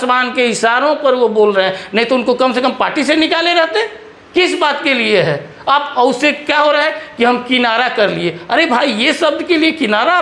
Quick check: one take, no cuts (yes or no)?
yes